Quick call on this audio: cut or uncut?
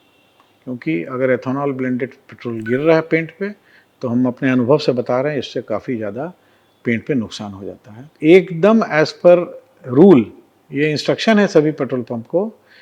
cut